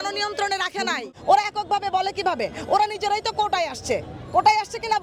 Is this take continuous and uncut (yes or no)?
no